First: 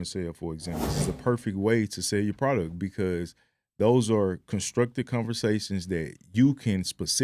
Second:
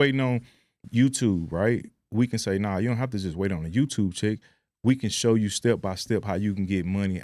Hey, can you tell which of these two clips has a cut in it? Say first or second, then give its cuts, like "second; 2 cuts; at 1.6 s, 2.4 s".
first; 1 cut; at 1.0 s